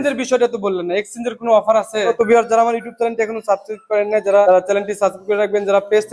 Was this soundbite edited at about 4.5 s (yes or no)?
yes